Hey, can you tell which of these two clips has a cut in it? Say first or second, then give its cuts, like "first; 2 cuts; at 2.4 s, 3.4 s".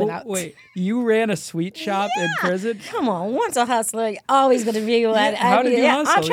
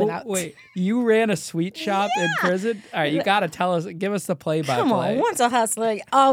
first; 1 cut; at 2.9 s